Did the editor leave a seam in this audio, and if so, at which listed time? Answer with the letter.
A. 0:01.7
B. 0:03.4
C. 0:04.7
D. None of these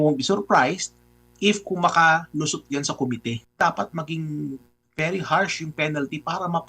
B